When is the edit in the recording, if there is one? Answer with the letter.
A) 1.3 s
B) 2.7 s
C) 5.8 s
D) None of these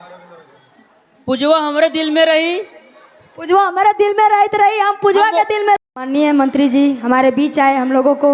C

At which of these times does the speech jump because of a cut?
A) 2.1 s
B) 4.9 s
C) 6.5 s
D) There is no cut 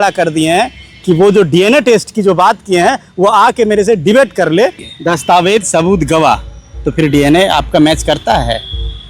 B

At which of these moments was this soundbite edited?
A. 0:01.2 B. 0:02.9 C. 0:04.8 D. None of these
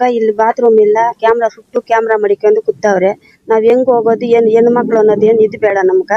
A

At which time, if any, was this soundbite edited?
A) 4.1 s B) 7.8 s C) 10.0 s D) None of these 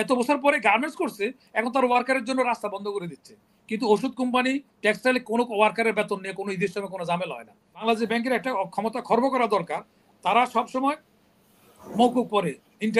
B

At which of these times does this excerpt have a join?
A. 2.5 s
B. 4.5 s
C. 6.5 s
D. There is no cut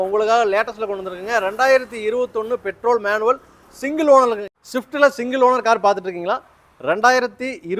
B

